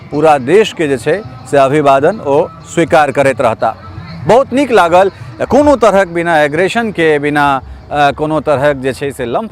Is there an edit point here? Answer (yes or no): no